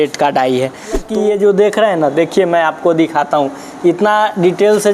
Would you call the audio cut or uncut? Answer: cut